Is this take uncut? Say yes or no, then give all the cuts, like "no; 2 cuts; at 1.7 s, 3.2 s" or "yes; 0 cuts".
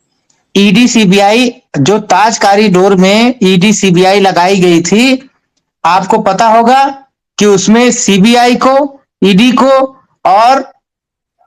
yes; 0 cuts